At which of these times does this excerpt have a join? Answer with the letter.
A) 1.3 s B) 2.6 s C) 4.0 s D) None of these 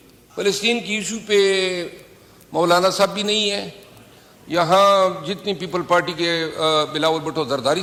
D